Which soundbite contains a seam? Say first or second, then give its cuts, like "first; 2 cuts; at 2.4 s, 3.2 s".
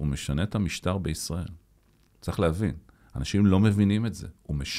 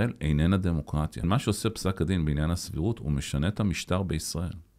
second; 1 cut; at 1.2 s